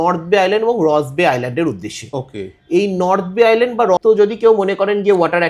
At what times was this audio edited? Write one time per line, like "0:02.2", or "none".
0:04.0